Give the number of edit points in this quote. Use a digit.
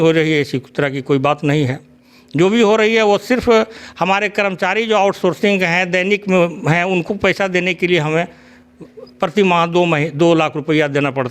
0